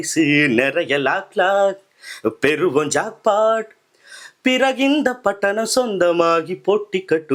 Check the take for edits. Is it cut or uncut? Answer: uncut